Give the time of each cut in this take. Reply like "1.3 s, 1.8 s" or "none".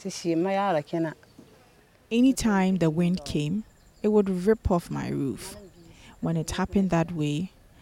2.1 s